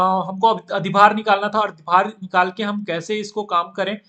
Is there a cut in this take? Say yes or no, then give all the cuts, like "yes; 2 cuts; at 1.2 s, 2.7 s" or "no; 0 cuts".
no; 0 cuts